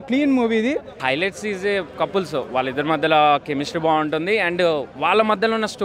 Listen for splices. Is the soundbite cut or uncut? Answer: cut